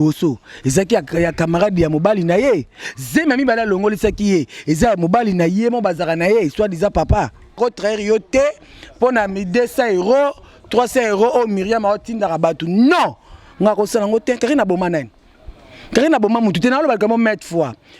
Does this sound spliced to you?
yes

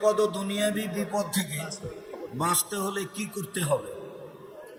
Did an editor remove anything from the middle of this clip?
no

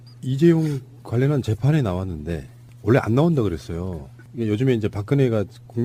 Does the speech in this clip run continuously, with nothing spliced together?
yes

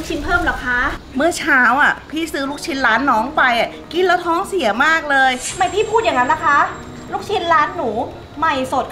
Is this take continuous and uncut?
no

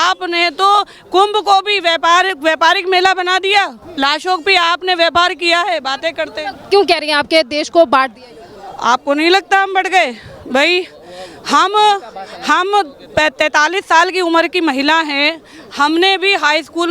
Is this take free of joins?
yes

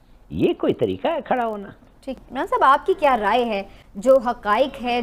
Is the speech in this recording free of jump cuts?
yes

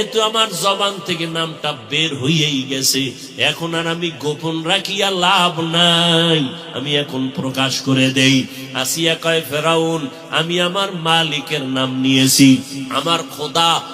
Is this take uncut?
no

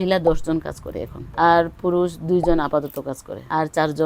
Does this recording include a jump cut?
no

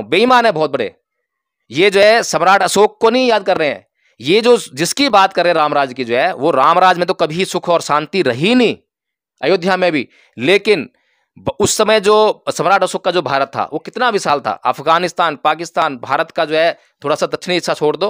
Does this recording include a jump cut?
no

